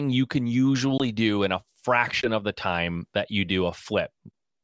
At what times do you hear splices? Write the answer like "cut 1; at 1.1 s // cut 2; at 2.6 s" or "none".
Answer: none